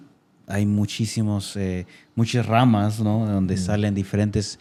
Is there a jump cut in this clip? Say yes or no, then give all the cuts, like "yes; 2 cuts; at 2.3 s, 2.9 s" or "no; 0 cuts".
no; 0 cuts